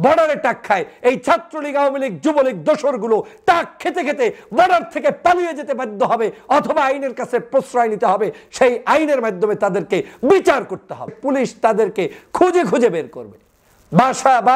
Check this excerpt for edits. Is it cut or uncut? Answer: cut